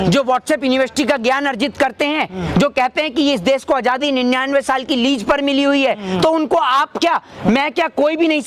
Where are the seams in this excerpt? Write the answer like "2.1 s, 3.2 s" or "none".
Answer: none